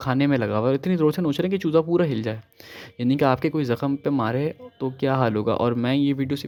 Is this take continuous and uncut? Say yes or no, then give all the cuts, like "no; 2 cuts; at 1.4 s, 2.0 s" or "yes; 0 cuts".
yes; 0 cuts